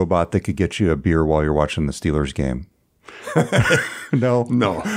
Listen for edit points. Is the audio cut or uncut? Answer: uncut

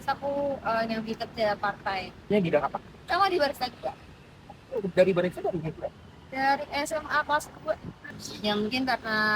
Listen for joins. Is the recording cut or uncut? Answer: cut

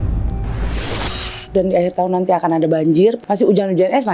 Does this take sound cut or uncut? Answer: cut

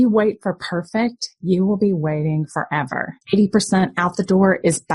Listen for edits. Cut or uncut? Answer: cut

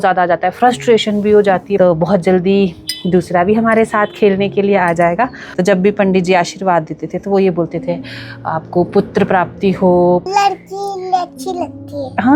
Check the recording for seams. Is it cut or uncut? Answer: cut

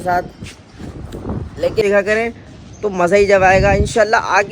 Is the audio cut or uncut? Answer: cut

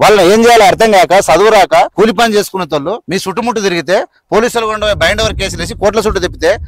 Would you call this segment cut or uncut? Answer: cut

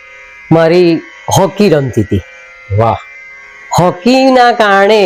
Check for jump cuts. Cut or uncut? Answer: uncut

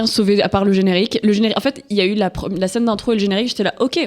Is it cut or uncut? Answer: uncut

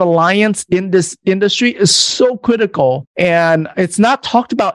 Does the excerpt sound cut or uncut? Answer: cut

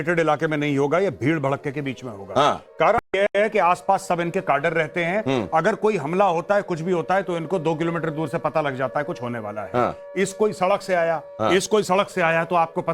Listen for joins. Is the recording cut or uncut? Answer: cut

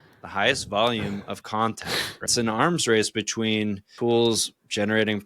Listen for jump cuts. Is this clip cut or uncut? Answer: cut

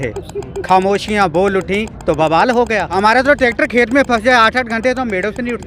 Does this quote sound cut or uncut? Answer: cut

